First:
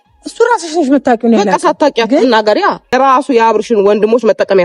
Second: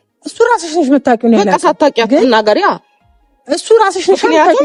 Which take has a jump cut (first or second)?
first